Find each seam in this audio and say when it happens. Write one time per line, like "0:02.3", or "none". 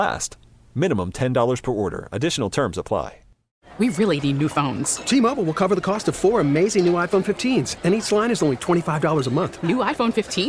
0:03.6